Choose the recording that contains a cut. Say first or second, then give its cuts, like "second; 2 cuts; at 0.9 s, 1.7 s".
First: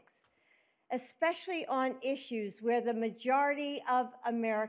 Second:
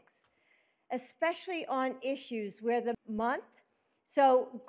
first; 1 cut; at 3.0 s